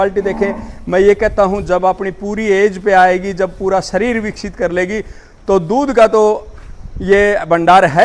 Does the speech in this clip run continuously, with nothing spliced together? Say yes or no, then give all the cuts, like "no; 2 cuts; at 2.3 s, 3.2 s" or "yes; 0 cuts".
yes; 0 cuts